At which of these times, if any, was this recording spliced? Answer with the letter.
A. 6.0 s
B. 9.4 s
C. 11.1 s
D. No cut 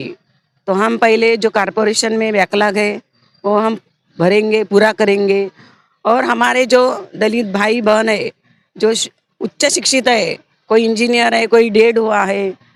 D